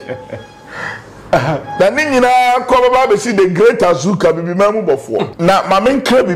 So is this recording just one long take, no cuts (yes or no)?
no